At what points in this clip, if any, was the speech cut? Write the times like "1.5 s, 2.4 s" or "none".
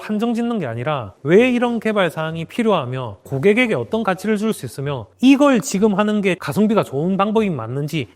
3.3 s, 5.1 s, 6.4 s